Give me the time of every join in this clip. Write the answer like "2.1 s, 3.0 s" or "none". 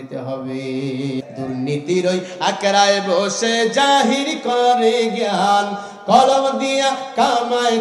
1.2 s

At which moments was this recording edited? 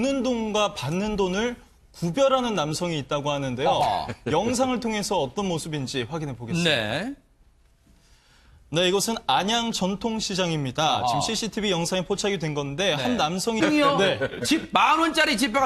none

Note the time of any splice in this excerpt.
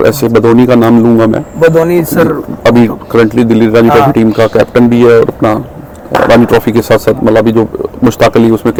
none

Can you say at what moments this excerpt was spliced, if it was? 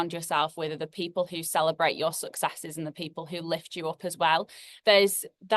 4.6 s

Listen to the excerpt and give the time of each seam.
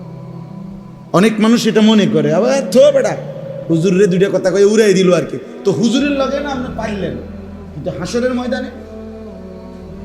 1.1 s

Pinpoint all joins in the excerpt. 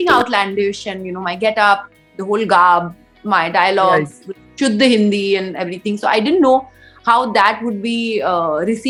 none

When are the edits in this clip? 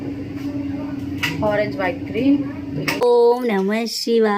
3.0 s

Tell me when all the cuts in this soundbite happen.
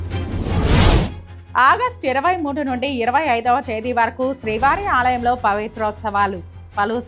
1.3 s

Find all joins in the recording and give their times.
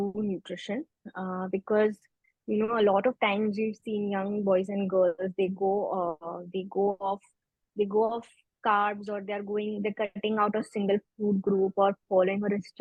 none

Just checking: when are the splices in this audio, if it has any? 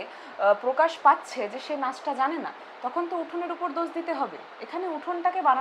none

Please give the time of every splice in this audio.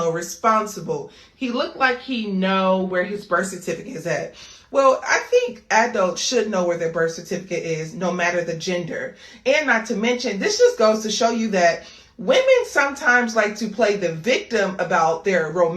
5.0 s

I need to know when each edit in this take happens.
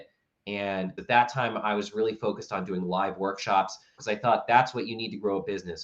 0.9 s, 3.9 s

